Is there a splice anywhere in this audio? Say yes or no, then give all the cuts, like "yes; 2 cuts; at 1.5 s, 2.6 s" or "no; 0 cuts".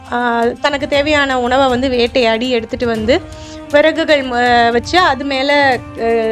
no; 0 cuts